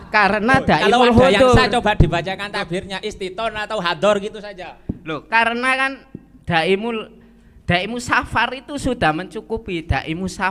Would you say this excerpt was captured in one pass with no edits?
yes; 0 cuts

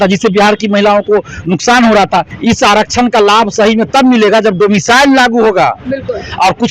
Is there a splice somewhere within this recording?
yes; 1 cut; at 2.3 s

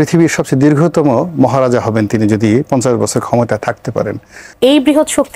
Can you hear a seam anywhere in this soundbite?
yes; 1 cut; at 4.5 s

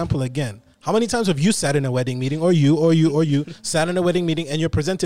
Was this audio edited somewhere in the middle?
no; 0 cuts

